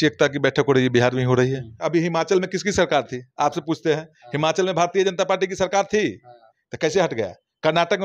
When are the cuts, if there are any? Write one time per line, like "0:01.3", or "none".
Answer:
0:01.8